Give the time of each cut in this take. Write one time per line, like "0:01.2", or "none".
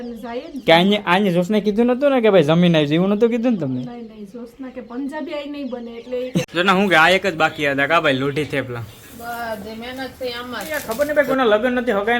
0:06.5
0:10.9